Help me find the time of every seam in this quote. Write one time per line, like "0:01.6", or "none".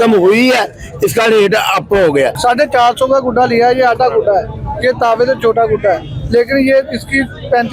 0:02.3